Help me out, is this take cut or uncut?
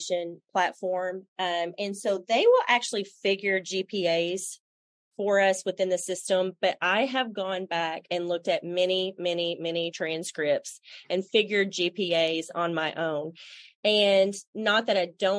uncut